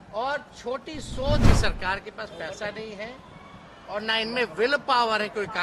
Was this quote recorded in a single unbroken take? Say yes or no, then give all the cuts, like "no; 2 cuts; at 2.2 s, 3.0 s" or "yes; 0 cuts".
no; 1 cut; at 1.4 s